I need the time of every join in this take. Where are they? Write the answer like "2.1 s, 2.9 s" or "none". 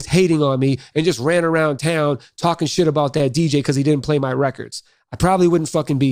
none